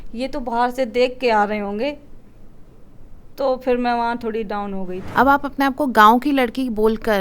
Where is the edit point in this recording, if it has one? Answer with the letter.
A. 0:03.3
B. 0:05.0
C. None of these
B